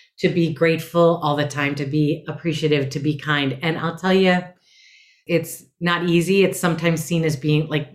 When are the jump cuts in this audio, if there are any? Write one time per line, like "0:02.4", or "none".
0:05.2

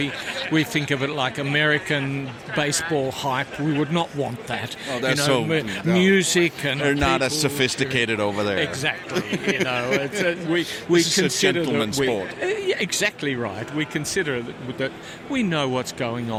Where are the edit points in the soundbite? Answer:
none

